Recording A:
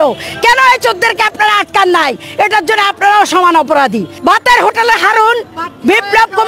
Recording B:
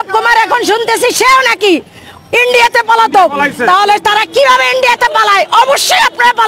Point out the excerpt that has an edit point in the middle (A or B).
A